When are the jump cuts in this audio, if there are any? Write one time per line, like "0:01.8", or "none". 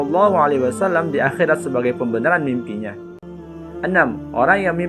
0:03.2